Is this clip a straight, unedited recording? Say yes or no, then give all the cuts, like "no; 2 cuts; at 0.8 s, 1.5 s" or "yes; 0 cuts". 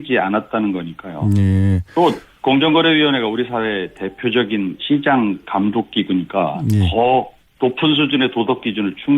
no; 1 cut; at 7.4 s